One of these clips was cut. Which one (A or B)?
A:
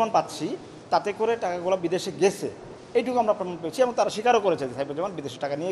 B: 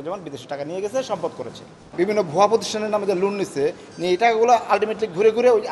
B